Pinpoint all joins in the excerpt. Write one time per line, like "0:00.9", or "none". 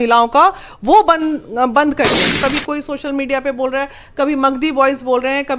0:02.3